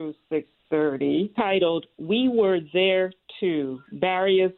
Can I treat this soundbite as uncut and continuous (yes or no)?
no